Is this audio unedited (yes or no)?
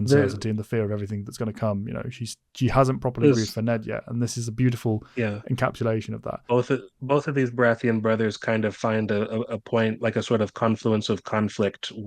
no